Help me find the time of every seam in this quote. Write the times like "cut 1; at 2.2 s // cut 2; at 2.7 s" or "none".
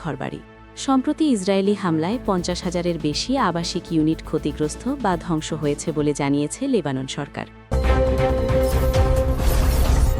cut 1; at 7.7 s